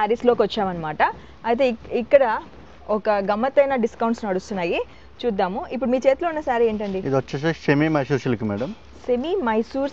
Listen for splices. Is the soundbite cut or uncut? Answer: uncut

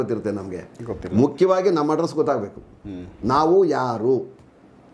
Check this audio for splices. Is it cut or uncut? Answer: uncut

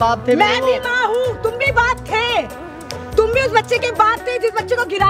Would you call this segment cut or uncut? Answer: uncut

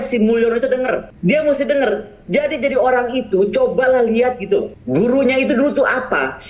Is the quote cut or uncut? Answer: cut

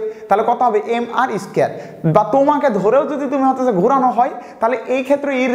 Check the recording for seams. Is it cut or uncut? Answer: uncut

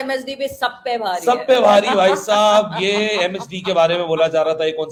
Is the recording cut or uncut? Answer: uncut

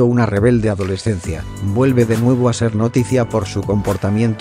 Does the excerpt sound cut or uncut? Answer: cut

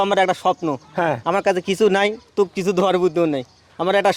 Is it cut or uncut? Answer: uncut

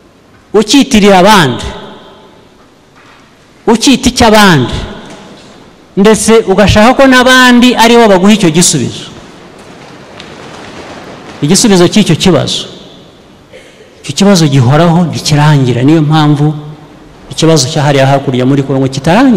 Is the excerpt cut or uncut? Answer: uncut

